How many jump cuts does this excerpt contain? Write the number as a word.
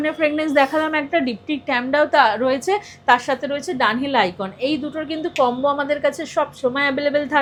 zero